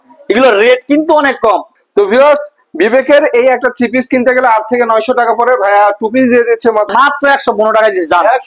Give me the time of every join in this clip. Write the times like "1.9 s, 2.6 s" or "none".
1.7 s, 6.9 s

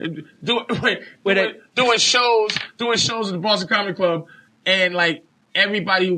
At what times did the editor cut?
4.2 s

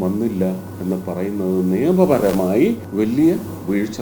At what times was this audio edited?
2.8 s

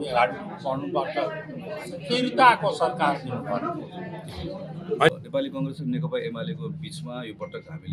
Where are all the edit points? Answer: 5.2 s

